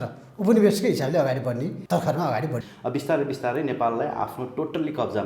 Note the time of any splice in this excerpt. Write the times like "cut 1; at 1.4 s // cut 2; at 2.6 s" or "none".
cut 1; at 1.8 s // cut 2; at 2.6 s